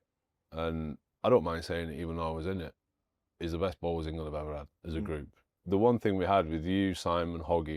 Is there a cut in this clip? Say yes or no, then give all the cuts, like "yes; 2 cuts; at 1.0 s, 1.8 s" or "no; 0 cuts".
yes; 1 cut; at 5.5 s